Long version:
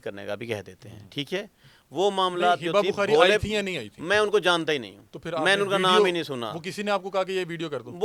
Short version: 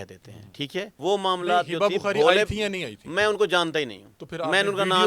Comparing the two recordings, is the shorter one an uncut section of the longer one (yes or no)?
no